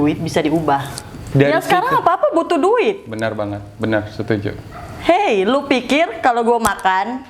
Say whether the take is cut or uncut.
cut